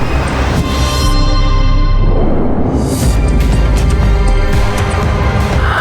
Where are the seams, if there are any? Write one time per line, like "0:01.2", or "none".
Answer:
none